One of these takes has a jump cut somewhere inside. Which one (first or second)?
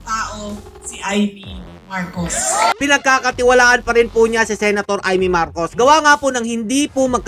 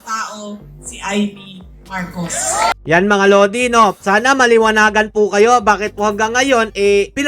first